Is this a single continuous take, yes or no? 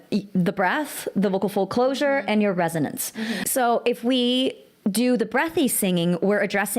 no